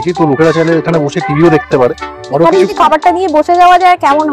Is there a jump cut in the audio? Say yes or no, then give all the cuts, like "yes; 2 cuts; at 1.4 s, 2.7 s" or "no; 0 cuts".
yes; 1 cut; at 1.9 s